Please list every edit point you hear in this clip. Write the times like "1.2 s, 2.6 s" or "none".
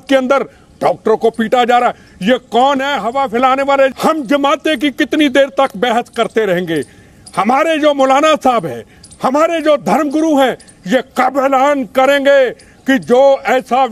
3.9 s